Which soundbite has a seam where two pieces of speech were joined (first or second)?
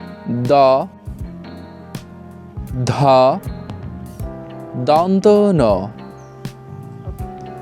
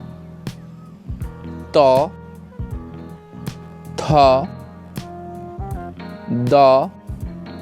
second